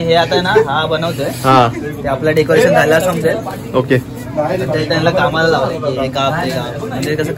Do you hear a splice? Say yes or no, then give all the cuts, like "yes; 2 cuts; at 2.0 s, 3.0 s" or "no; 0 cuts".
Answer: no; 0 cuts